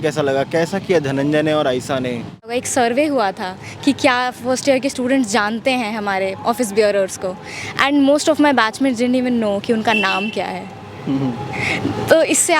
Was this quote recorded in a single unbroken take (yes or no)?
no